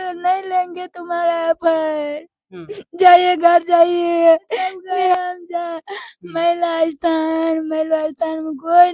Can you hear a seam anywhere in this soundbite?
yes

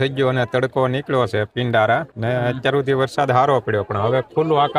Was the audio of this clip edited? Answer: yes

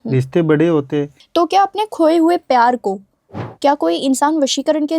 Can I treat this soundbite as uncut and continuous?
no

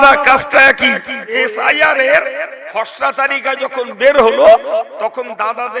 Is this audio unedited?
no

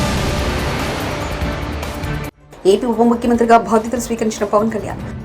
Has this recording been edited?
yes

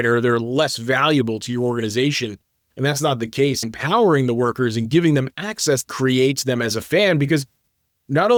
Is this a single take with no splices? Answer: yes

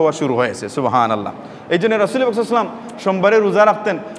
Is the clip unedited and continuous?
yes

